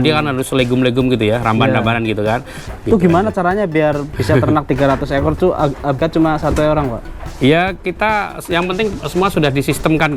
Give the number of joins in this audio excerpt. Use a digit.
3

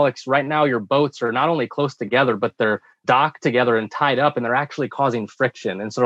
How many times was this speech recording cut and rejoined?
1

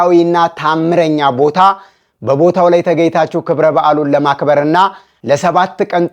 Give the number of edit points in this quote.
1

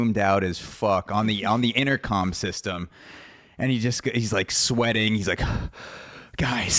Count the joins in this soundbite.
0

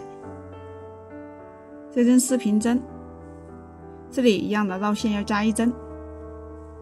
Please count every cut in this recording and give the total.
1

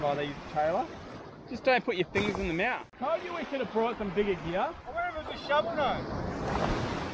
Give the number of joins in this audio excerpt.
1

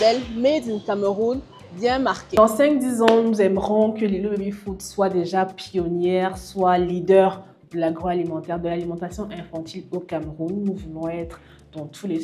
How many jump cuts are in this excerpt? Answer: 0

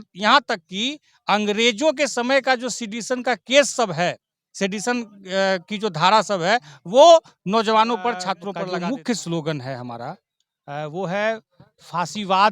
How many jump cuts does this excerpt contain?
1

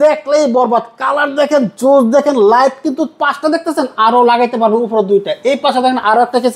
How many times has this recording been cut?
0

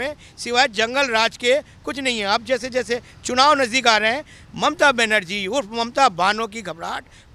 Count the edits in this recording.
0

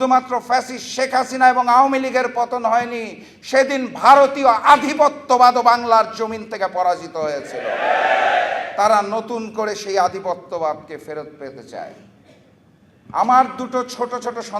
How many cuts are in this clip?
0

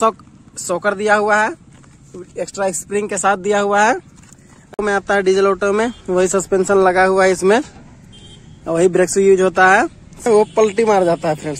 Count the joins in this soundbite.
2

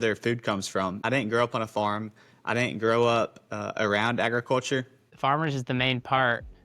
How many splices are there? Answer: 2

